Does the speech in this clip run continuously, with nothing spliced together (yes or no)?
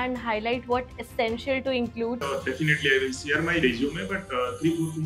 no